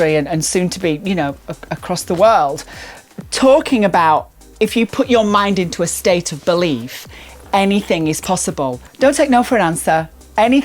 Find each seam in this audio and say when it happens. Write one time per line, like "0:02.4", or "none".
0:08.8